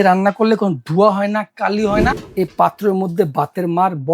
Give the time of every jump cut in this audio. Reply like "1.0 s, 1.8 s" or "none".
2.2 s